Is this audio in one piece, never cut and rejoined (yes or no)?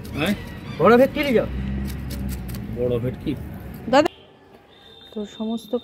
no